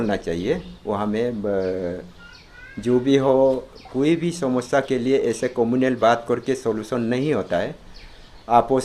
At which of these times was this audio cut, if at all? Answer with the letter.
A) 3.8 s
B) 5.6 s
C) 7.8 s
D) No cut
D